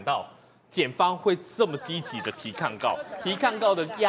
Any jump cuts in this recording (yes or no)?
no